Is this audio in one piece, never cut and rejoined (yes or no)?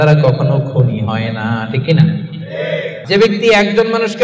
no